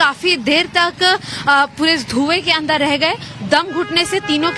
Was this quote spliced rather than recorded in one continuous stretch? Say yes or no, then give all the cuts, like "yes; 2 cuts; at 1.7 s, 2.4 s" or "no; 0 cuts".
no; 0 cuts